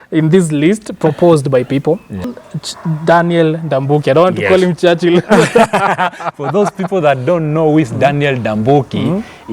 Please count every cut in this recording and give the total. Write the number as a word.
one